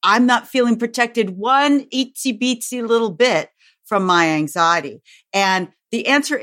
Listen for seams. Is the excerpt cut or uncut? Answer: uncut